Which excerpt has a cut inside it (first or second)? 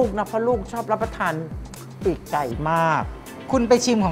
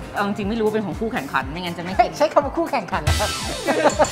first